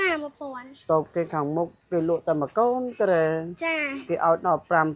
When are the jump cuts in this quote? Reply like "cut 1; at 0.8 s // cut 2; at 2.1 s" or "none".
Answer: none